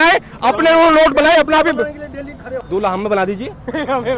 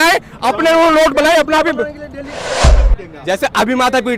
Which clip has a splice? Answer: second; 1 cut; at 2.6 s

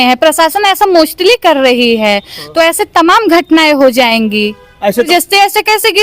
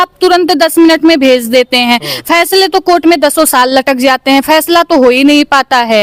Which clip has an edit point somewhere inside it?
first; 1 cut; at 5.1 s

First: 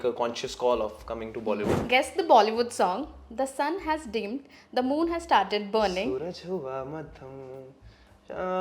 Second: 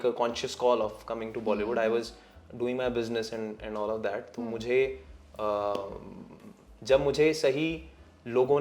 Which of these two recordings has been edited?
first; 1 cut; at 1.7 s

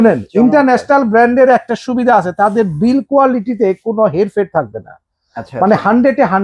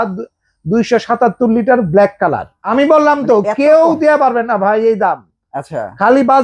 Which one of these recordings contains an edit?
second; 1 cut; at 2.5 s

